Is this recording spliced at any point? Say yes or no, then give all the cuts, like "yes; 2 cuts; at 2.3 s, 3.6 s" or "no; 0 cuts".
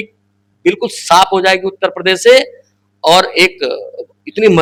no; 0 cuts